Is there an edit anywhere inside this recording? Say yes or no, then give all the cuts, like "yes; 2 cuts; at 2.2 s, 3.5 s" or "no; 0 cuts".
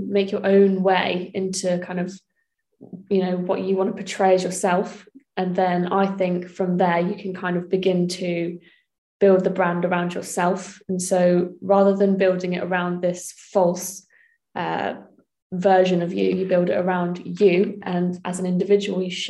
no; 0 cuts